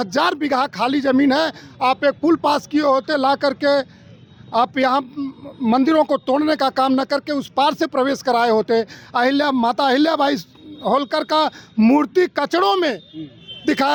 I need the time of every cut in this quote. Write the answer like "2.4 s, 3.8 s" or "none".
none